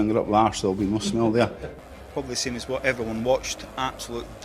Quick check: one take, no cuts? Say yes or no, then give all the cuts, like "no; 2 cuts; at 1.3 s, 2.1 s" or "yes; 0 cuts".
no; 1 cut; at 1.6 s